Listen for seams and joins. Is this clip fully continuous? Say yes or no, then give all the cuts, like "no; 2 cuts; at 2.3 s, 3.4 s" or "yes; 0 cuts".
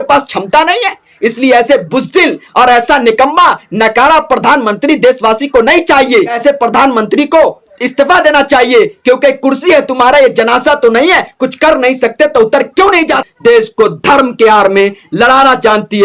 no; 2 cuts; at 6.4 s, 13.2 s